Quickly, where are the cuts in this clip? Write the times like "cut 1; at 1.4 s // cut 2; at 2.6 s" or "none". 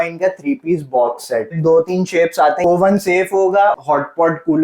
cut 1; at 1.6 s // cut 2; at 2.6 s // cut 3; at 3.8 s

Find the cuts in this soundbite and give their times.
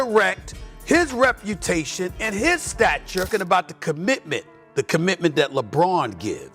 cut 1; at 3.3 s

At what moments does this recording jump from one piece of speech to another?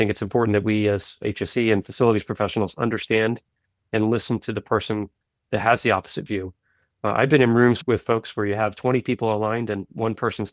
cut 1; at 1.2 s // cut 2; at 7.8 s

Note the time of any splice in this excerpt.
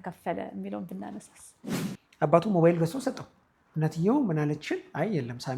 cut 1; at 1.7 s

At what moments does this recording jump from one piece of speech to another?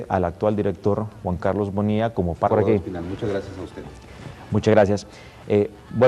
none

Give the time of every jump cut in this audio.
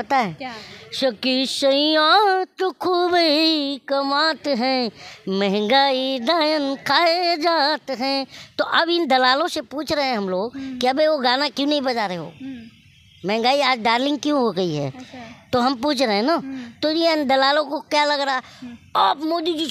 none

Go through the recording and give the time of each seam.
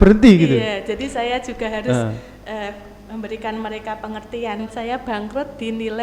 cut 1; at 4.6 s

